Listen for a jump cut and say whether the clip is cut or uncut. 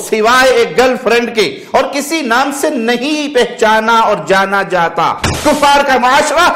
cut